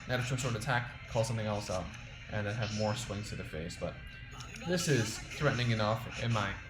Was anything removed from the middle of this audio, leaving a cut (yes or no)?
no